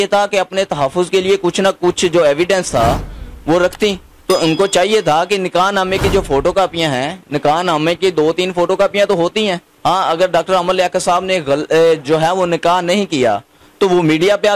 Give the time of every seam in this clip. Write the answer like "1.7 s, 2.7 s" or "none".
4.1 s, 9.7 s